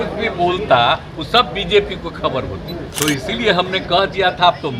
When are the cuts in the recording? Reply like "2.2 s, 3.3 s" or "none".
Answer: 2.9 s